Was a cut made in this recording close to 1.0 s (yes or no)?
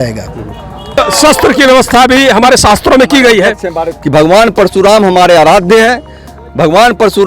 yes